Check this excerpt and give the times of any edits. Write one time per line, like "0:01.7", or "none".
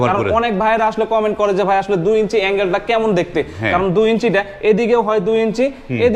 none